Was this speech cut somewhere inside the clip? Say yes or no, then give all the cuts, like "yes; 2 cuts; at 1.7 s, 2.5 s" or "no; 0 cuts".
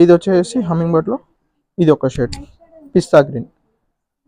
no; 0 cuts